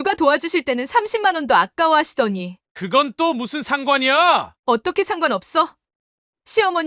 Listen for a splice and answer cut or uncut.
uncut